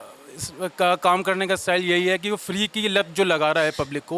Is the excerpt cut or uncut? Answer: uncut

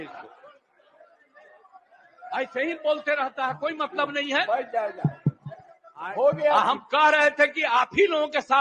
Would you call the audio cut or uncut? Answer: uncut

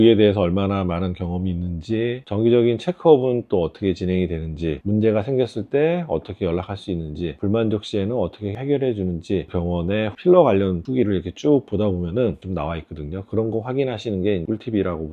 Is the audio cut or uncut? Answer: cut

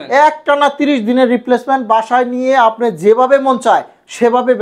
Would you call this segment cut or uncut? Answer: uncut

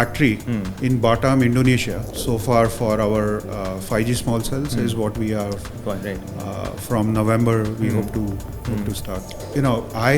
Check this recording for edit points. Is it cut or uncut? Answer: cut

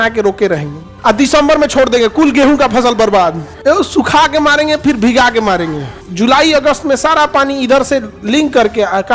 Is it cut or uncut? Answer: cut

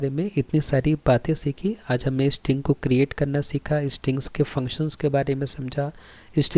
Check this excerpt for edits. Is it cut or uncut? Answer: uncut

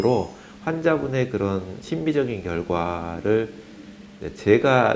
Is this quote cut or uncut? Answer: uncut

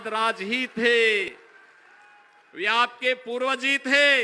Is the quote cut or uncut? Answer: cut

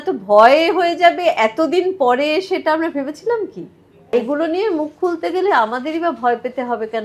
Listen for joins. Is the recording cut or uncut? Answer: cut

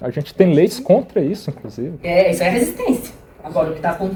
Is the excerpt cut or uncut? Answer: uncut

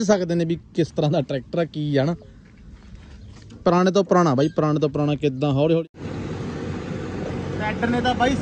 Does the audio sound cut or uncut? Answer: cut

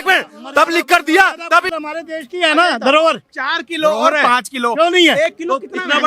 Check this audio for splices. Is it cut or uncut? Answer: cut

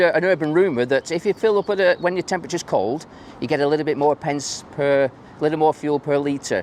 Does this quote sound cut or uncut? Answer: uncut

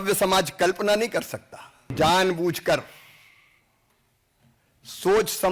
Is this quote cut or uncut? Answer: cut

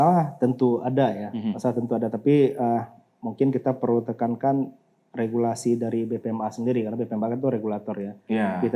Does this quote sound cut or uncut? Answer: uncut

